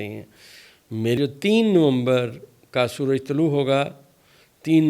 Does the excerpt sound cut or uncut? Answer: cut